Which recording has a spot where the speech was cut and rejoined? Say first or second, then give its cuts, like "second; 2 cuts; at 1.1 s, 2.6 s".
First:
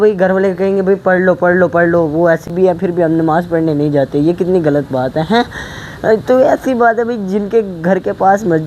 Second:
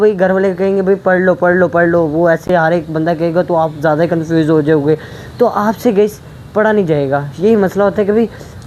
first; 1 cut; at 2.5 s